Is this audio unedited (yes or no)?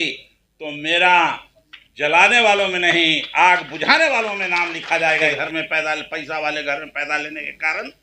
no